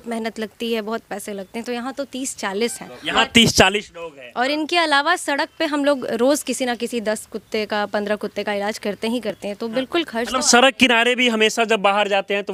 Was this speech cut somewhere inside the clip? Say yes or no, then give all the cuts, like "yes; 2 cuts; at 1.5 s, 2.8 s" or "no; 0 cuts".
no; 0 cuts